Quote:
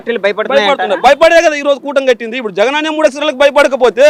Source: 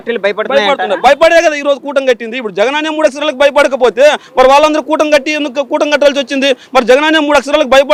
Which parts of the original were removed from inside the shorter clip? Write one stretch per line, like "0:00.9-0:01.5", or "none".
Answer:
none